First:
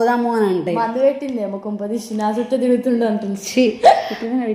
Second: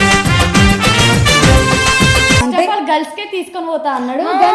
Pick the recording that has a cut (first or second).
second